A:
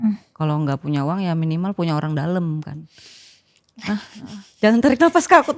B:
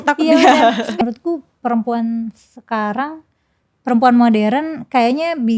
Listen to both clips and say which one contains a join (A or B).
B